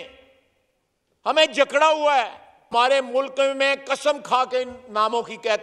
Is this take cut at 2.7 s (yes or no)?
yes